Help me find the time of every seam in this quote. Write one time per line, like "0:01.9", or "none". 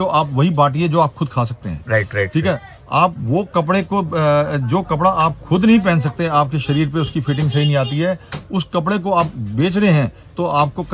none